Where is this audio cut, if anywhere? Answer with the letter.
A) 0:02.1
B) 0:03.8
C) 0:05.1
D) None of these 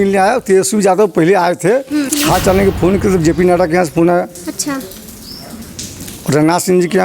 A